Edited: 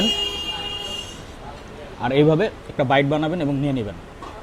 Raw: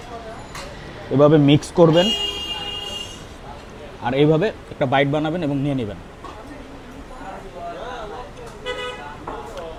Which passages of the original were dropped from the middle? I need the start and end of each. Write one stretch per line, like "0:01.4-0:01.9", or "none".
none